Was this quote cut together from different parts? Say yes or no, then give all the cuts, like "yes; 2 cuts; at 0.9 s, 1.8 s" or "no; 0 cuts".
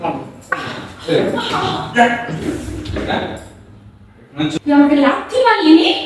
no; 0 cuts